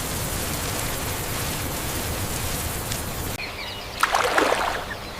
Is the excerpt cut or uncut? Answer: cut